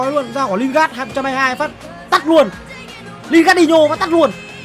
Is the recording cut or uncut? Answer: uncut